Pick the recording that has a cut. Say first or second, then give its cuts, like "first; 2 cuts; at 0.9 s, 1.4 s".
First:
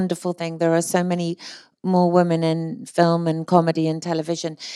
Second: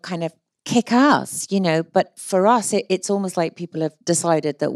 second; 2 cuts; at 2.2 s, 4.0 s